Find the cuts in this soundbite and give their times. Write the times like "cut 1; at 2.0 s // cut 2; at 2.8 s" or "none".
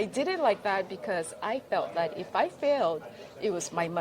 none